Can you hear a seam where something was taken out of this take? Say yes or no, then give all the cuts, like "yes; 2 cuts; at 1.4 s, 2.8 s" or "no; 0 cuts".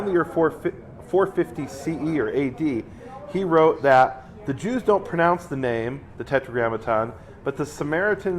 no; 0 cuts